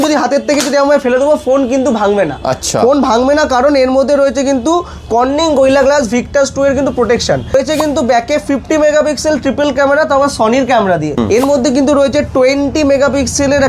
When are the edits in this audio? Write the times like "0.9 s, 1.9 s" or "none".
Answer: 7.5 s, 11.1 s